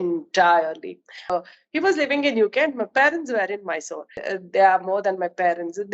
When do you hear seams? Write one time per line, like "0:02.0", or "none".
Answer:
0:01.3
0:04.1